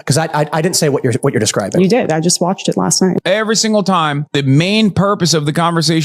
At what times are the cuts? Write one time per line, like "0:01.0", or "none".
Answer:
0:03.2